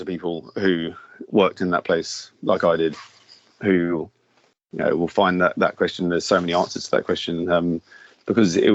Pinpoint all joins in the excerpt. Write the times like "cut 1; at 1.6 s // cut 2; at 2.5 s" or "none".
none